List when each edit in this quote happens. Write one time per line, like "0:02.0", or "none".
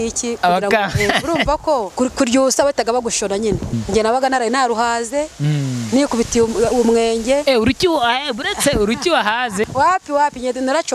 0:01.9
0:03.7
0:09.7